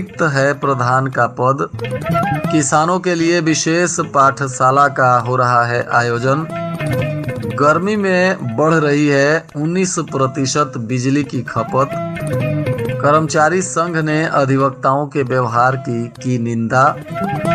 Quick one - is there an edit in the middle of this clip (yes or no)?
no